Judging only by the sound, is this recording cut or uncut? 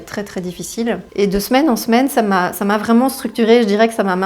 cut